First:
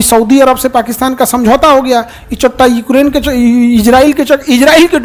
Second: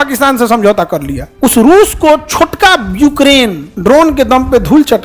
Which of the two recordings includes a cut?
second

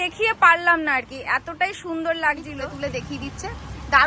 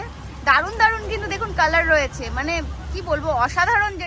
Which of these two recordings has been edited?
first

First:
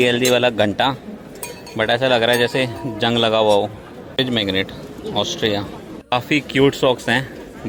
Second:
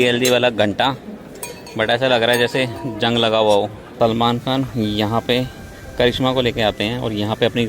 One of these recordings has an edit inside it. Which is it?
second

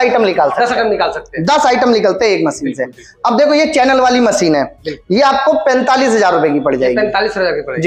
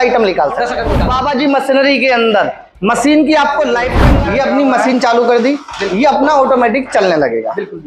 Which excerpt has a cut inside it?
second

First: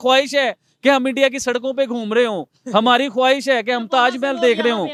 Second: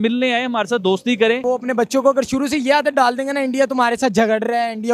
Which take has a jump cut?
second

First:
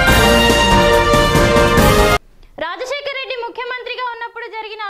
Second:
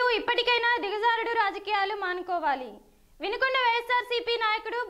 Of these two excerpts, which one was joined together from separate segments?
first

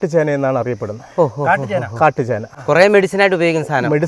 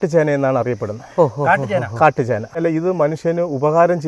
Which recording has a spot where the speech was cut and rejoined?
second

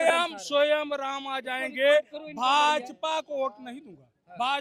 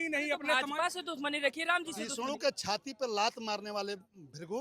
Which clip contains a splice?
second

